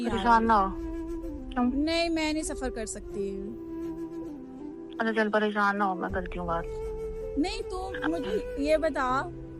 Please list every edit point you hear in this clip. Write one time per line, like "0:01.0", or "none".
0:06.8